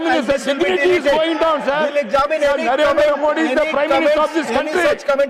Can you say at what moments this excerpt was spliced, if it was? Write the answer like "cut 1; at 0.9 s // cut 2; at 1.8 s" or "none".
none

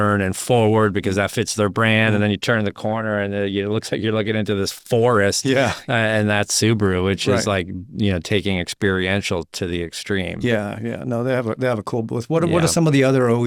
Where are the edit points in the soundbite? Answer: none

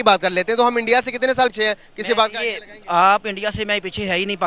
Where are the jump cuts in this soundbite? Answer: cut 1; at 1.5 s

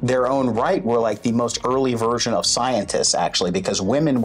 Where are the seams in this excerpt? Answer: none

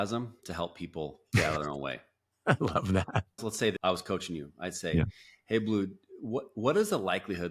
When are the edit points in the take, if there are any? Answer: cut 1; at 3.4 s

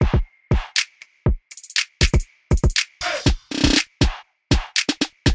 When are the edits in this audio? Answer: cut 1; at 1.1 s

